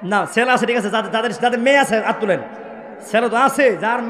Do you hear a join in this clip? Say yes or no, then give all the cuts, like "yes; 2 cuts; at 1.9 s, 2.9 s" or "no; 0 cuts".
no; 0 cuts